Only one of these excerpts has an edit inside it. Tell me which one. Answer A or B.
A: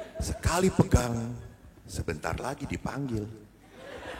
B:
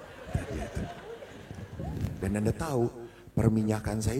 B